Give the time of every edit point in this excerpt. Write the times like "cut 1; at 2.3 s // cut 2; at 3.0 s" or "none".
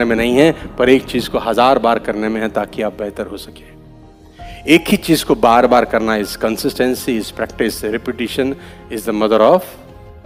none